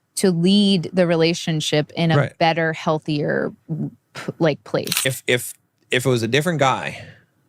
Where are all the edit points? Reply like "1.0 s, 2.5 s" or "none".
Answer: 5.1 s